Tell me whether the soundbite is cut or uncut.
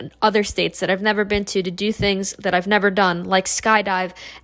uncut